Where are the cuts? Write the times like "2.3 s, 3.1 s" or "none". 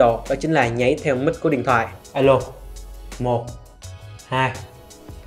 2.0 s